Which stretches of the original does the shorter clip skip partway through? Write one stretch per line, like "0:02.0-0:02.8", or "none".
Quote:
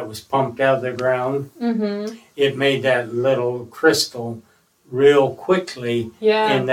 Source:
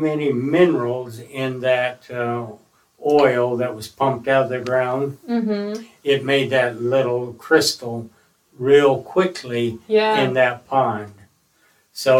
none